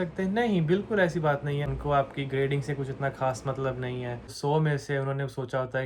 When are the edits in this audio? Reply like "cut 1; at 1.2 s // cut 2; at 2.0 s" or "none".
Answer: cut 1; at 1.8 s // cut 2; at 4.4 s